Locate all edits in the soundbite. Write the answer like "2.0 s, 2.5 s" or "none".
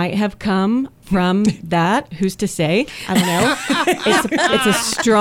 1.0 s

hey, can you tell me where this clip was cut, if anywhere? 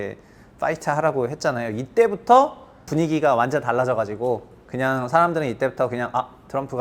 2.8 s

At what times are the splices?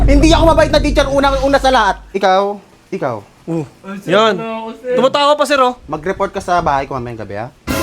2.0 s

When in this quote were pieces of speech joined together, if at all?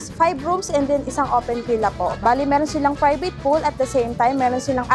2.2 s

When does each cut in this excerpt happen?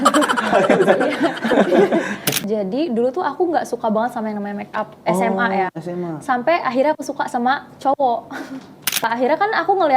2.3 s, 9.0 s

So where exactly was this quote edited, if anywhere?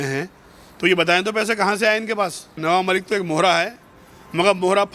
2.6 s

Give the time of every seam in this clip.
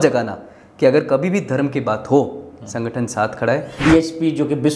3.8 s

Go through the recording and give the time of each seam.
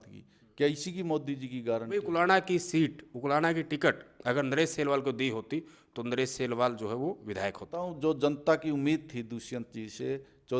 2.0 s, 7.8 s

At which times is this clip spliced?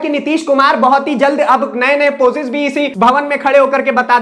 2.9 s

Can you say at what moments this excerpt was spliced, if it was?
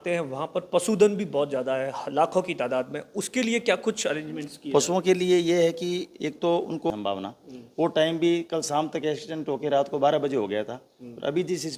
6.9 s

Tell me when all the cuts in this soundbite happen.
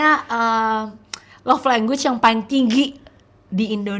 none

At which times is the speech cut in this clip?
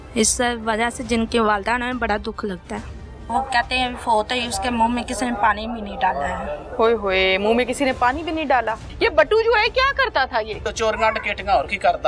3.2 s, 8.9 s, 10.7 s

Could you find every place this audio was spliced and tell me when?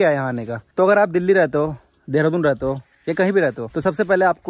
none

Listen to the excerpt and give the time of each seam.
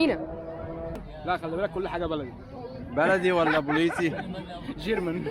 1.0 s

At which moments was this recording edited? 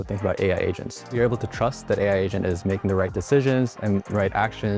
1.0 s

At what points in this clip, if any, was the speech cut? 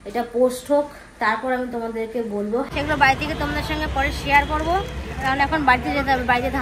2.7 s

